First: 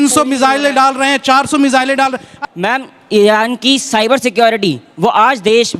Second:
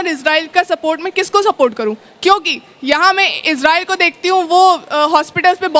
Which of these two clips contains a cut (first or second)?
first